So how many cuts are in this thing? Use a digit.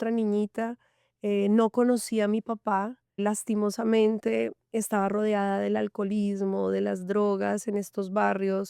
1